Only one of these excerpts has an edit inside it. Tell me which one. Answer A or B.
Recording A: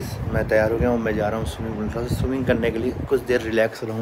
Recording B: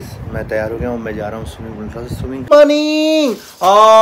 B